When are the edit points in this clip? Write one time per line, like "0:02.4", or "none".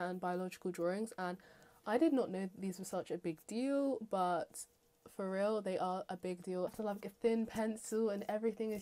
0:06.7